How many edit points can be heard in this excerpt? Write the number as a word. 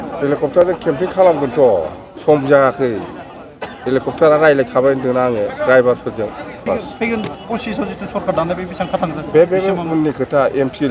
one